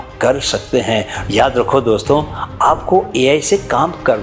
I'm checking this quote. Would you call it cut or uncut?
cut